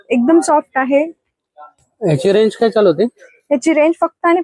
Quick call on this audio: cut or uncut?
uncut